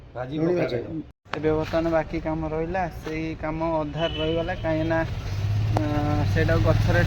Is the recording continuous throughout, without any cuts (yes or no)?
no